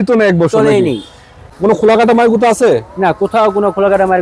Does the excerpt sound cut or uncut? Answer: cut